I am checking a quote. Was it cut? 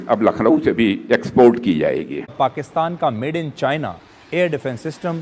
yes; 1 cut; at 2.3 s

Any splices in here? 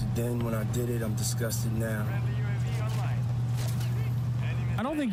no; 0 cuts

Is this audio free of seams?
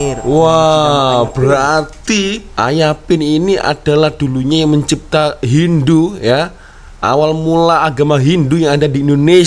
yes; 0 cuts

